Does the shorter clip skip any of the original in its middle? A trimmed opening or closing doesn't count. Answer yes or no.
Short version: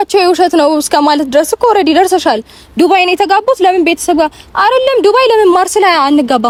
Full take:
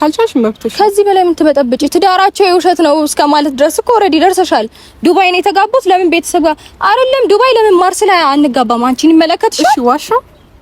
no